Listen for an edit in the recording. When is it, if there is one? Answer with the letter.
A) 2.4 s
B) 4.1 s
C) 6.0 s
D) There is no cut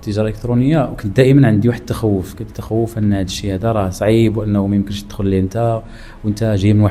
D